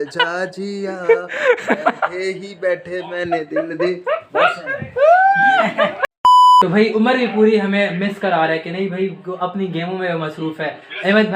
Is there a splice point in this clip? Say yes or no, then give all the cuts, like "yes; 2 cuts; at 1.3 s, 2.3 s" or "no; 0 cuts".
no; 0 cuts